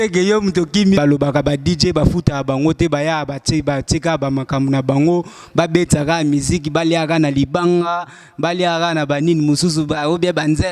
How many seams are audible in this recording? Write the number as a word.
one